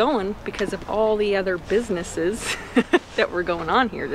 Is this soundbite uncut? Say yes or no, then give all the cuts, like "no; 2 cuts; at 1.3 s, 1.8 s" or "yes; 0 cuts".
yes; 0 cuts